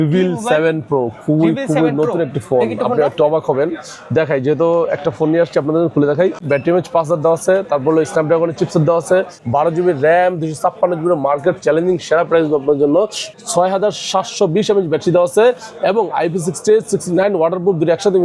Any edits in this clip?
yes; 3 cuts; at 6.4 s, 9.4 s, 13.2 s

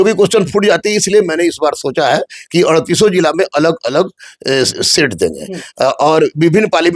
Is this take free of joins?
yes; 0 cuts

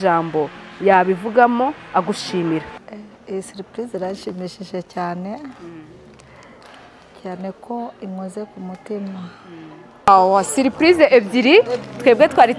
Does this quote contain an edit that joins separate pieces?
yes; 2 cuts; at 2.7 s, 10.1 s

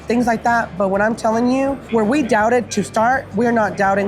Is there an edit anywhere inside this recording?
no; 0 cuts

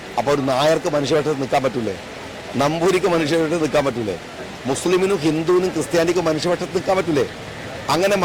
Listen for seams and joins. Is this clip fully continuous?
yes; 0 cuts

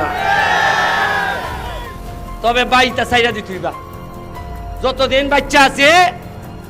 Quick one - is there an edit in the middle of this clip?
no; 0 cuts

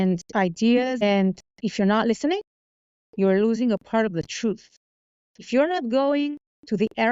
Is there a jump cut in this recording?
yes; 1 cut; at 1.0 s

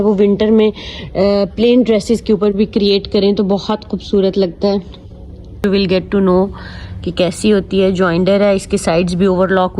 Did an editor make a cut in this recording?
yes; 1 cut; at 5.6 s

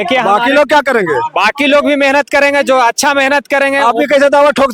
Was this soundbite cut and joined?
no; 0 cuts

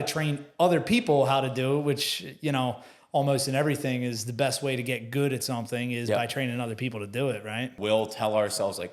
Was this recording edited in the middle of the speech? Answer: yes; 1 cut; at 7.7 s

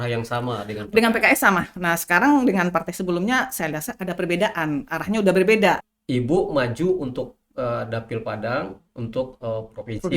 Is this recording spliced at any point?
yes; 1 cut; at 5.9 s

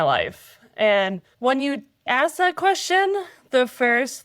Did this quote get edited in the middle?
yes; 2 cuts; at 1.3 s, 2.1 s

